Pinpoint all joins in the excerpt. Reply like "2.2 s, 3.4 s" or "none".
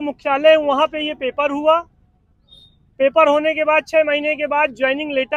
none